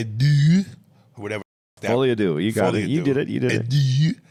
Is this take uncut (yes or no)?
yes